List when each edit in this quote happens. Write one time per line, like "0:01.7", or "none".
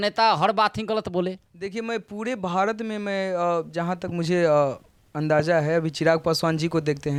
none